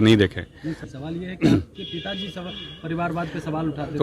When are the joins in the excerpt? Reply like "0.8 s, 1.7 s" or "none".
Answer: 0.9 s